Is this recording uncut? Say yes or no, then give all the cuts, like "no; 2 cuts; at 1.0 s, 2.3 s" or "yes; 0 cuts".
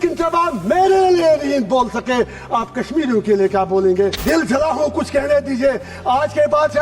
no; 1 cut; at 4.2 s